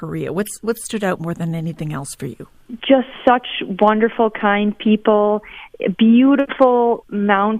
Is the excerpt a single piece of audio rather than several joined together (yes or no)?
yes